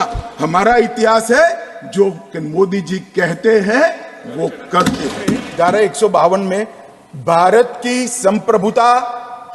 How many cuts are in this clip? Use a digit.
1